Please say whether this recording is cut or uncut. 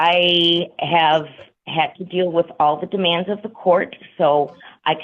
uncut